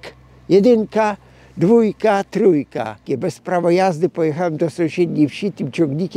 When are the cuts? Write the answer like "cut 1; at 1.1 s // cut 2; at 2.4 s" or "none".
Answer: cut 1; at 3.0 s